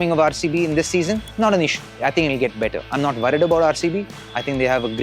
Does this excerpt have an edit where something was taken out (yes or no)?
yes